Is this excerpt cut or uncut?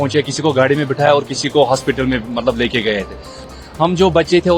cut